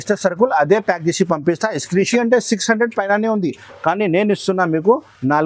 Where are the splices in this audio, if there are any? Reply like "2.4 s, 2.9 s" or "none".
2.1 s